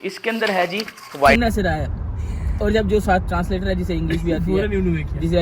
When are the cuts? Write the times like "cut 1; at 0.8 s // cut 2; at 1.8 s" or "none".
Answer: cut 1; at 1.3 s